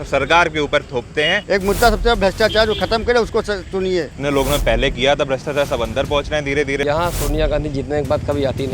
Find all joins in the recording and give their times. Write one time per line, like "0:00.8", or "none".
0:01.4
0:04.1
0:06.8